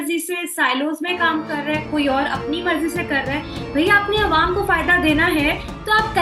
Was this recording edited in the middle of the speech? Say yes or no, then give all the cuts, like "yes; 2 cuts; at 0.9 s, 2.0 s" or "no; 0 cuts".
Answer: no; 0 cuts